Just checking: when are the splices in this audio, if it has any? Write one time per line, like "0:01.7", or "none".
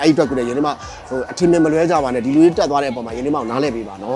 none